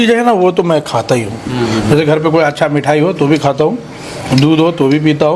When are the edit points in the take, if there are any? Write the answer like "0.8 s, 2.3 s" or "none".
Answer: none

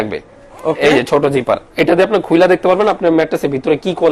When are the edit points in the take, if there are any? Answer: none

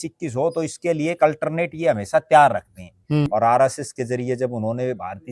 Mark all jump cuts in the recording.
3.3 s

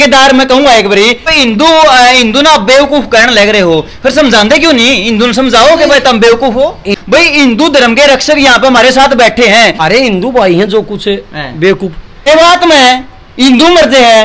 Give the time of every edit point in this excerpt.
1.3 s, 6.9 s, 9.8 s, 12.3 s

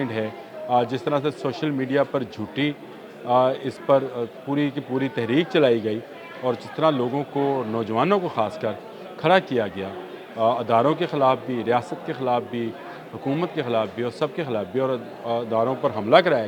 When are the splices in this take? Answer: none

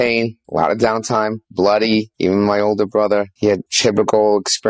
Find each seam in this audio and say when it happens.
none

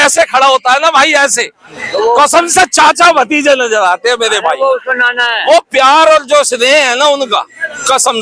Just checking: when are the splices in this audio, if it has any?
none

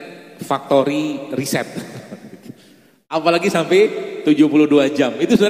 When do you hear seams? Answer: none

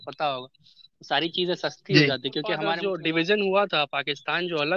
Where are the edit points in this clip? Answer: 2.6 s

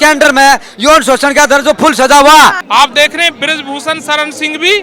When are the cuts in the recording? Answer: 2.6 s

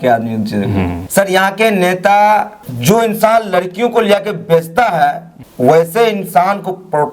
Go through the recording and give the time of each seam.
1.0 s

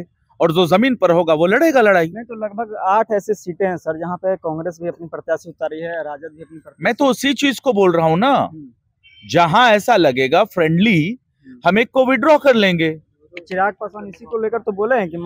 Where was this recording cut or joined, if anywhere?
none

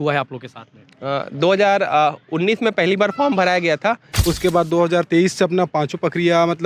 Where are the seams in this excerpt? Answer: 4.1 s

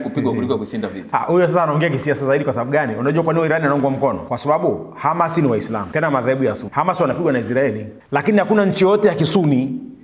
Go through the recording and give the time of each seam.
4.2 s, 5.8 s, 6.6 s, 7.9 s

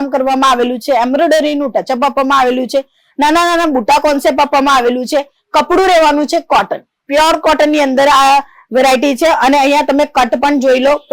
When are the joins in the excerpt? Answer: none

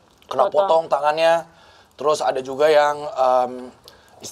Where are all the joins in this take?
none

